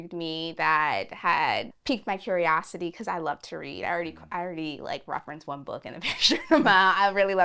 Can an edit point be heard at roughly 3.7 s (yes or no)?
no